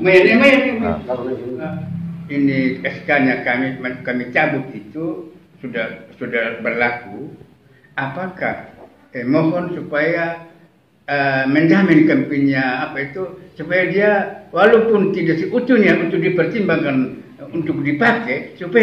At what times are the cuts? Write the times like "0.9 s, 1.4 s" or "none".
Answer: 1.6 s